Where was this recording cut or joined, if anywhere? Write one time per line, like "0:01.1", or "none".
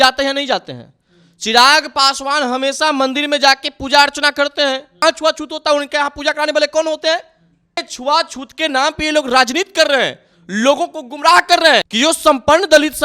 0:04.9
0:07.9
0:11.9